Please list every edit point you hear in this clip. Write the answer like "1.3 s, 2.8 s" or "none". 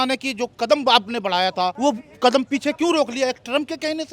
1.7 s